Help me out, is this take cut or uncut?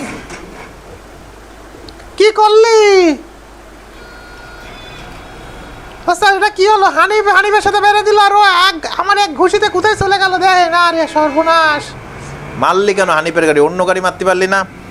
uncut